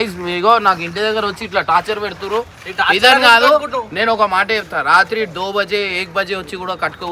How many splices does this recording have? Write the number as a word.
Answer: zero